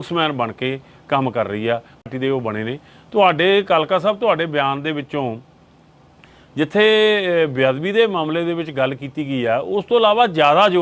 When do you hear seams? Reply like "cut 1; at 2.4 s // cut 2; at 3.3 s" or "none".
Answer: cut 1; at 2.0 s